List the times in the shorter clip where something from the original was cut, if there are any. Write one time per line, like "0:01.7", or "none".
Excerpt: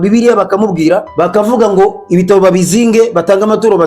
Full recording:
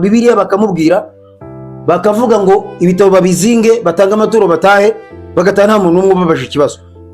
0:01.1